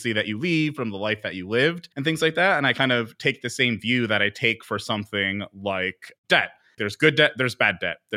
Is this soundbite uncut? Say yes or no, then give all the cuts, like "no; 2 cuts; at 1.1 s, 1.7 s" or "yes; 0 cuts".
no; 2 cuts; at 1.9 s, 6.8 s